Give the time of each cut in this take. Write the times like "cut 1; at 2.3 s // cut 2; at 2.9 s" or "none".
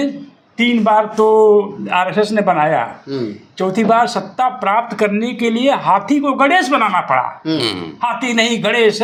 none